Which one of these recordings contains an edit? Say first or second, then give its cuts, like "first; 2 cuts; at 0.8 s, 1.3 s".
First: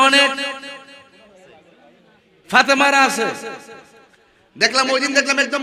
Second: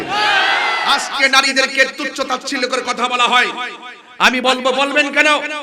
second; 1 cut; at 0.9 s